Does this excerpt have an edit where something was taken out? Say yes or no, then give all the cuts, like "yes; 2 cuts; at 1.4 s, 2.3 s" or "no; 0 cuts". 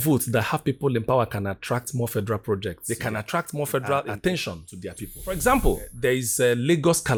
no; 0 cuts